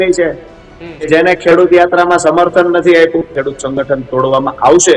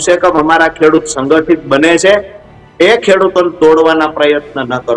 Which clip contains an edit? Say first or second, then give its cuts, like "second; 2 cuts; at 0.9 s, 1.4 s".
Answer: first; 1 cut; at 3.4 s